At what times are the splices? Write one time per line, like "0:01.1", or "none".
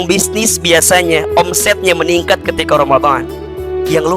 none